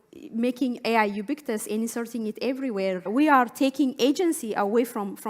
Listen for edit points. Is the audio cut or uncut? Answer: cut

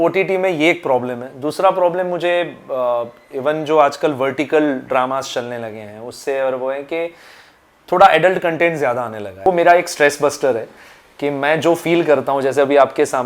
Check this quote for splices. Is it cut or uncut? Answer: cut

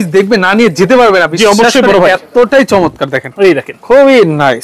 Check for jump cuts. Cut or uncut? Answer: uncut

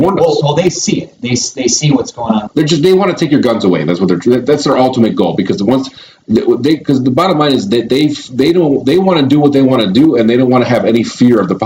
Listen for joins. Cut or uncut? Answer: cut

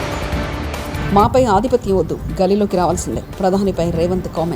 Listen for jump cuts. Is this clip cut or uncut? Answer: cut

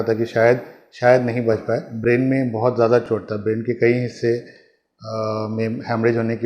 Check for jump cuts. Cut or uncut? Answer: cut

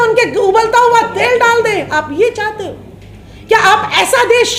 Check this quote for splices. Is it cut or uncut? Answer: uncut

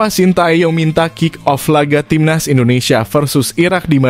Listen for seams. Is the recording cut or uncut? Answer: uncut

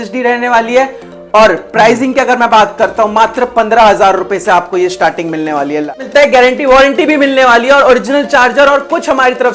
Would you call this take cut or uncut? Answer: cut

